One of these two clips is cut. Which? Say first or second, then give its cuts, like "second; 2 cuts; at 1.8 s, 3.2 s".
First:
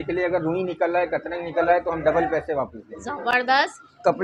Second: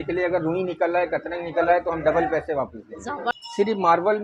second; 1 cut; at 3.3 s